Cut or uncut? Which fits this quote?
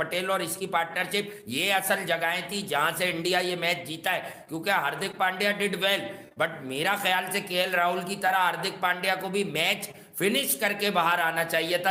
uncut